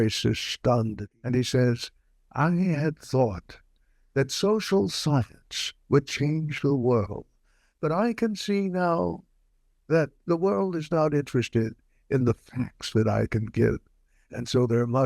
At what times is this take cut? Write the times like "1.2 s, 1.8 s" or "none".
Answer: 1.0 s